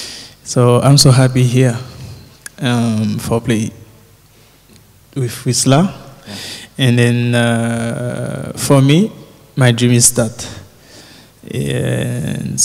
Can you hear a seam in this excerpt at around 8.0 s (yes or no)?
no